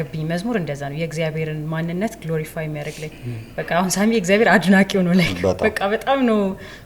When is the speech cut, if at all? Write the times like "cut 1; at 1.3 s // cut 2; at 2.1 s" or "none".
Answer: none